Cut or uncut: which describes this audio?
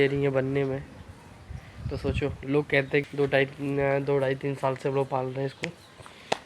cut